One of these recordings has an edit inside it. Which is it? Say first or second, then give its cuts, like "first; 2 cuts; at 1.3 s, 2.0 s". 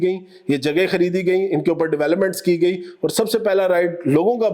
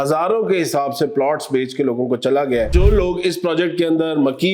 second; 1 cut; at 2.7 s